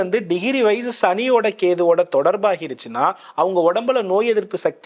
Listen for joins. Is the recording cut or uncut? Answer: uncut